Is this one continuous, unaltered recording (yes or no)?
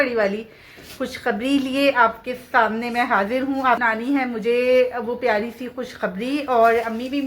no